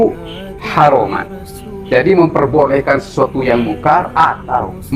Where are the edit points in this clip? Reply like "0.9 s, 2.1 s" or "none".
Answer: none